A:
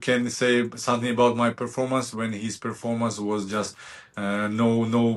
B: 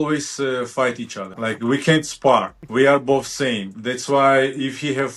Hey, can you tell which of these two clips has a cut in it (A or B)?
B